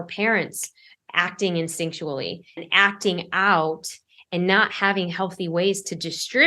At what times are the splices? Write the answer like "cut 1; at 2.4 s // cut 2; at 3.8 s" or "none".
cut 1; at 2.6 s

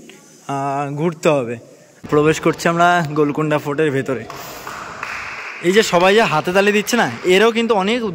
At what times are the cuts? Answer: cut 1; at 1.9 s

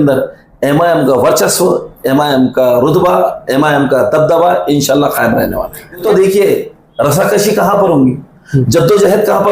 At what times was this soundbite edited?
cut 1; at 6.0 s

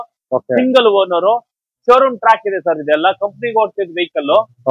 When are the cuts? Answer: none

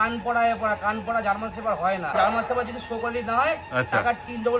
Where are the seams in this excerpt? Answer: cut 1; at 2.1 s

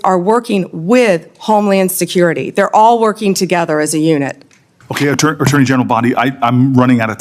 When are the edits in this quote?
none

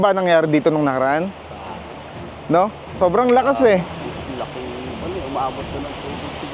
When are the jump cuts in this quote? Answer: none

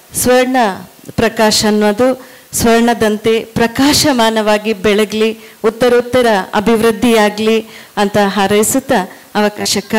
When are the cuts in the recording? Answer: none

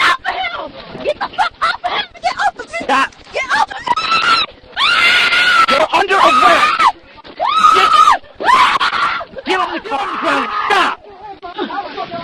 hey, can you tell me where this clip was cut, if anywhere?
cut 1; at 10.1 s

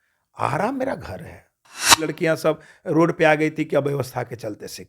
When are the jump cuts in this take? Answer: cut 1; at 2.1 s

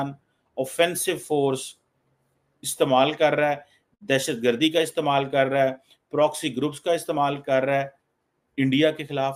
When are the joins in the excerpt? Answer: none

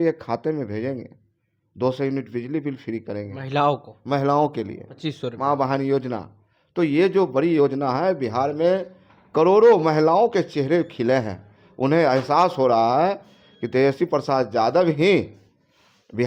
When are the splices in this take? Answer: none

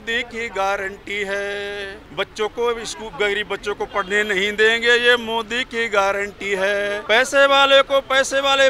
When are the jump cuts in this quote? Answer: cut 1; at 2.0 s // cut 2; at 7.0 s

